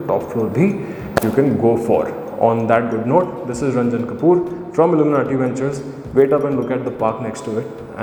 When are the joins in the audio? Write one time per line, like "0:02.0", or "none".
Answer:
none